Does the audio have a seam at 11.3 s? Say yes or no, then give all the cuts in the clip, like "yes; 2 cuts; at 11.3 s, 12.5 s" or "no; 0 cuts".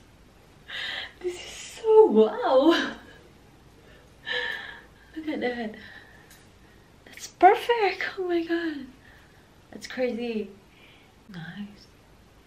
yes; 1 cut; at 11.3 s